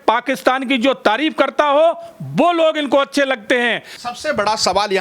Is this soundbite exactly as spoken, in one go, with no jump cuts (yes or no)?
yes